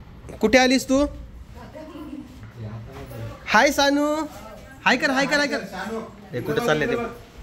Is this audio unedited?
yes; 0 cuts

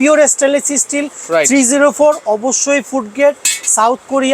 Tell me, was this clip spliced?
no; 0 cuts

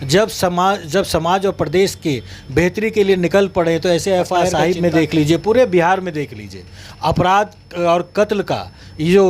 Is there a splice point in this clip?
yes; 1 cut; at 4.5 s

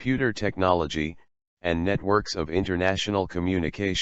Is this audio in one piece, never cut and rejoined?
no; 1 cut; at 2.7 s

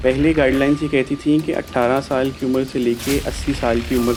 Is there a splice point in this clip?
no; 0 cuts

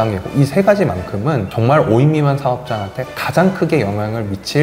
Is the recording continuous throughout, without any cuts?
no; 1 cut; at 1.5 s

